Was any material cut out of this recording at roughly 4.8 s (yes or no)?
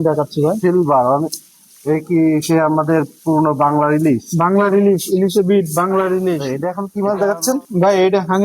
no